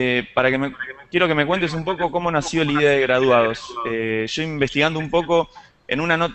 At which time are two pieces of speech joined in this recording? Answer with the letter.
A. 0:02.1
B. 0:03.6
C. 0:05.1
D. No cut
C